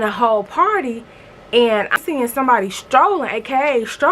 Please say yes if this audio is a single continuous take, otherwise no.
no